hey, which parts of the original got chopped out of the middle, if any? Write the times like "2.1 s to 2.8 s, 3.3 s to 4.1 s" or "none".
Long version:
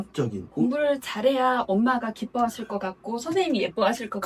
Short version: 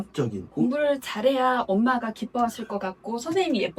none

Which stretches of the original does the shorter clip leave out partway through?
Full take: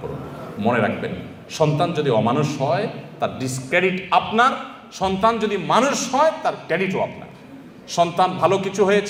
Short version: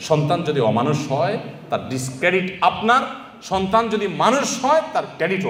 none

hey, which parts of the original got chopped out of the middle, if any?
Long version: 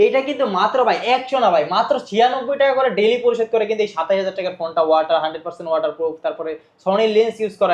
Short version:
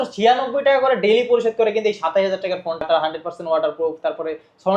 4.8 s to 5.0 s

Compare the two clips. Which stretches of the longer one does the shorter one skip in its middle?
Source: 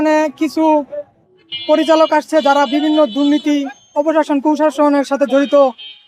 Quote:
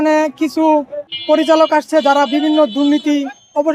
1.1 s to 1.5 s

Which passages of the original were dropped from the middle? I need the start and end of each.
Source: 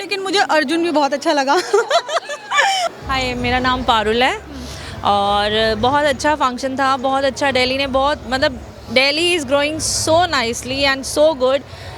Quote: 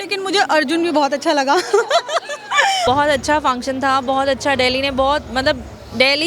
2.8 s to 5.8 s

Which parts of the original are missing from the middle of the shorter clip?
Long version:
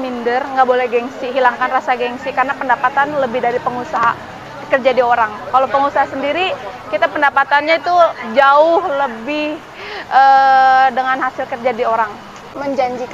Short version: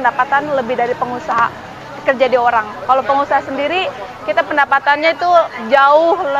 none

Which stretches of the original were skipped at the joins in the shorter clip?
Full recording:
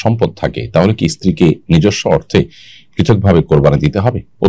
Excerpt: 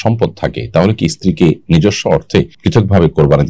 2.6 s to 2.9 s

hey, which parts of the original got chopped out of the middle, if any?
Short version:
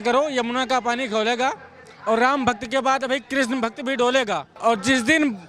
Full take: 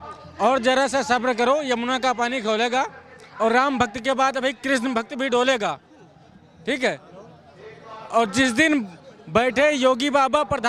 5.8 s to 8.0 s

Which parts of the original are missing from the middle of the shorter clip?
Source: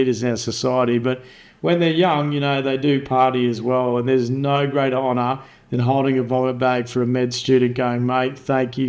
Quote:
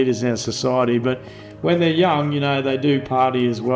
none

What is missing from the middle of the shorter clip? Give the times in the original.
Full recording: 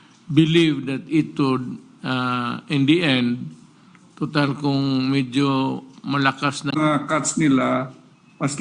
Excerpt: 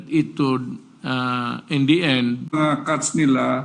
3.5 s to 6.7 s

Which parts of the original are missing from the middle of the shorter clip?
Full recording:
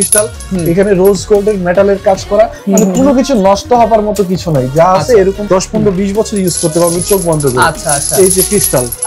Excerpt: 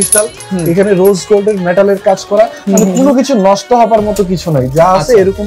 none

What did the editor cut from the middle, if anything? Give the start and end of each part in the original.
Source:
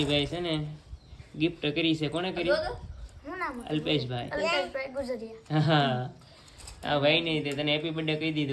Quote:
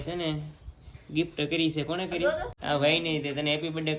2.8 s to 6.7 s

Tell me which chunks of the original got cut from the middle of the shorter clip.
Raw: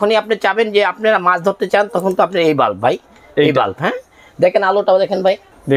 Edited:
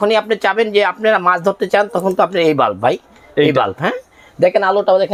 none

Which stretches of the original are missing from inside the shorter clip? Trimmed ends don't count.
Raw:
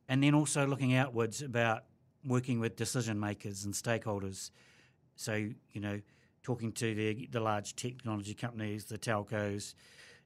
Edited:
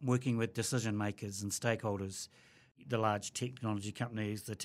5.0 s to 7.2 s

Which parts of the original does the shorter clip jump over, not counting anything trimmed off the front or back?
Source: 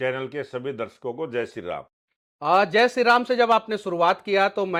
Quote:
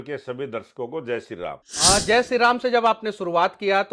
1.9 s to 2.3 s

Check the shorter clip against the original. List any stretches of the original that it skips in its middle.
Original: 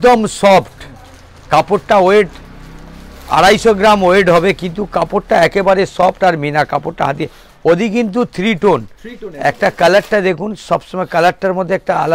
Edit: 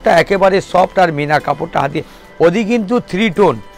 none

